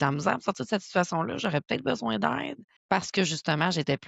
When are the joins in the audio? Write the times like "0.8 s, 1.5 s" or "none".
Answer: 2.7 s